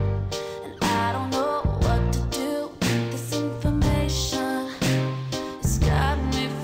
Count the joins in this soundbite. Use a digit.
1